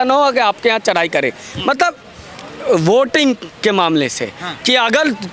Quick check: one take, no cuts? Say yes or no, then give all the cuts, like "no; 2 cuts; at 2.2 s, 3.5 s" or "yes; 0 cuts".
yes; 0 cuts